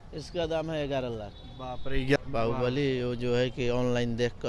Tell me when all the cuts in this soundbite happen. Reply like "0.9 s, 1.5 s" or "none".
2.2 s